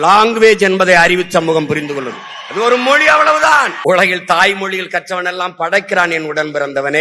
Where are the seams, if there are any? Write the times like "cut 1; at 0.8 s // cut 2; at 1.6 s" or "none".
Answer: cut 1; at 3.7 s